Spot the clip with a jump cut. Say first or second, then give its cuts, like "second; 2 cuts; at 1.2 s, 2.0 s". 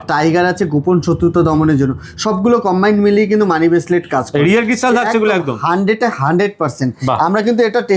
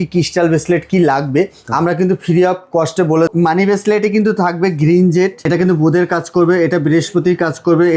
second; 2 cuts; at 3.3 s, 5.4 s